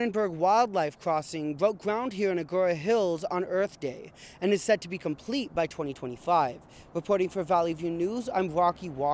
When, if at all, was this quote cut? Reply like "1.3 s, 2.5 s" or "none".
none